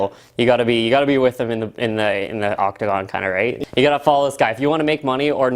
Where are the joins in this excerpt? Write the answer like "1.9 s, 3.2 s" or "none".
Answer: 3.6 s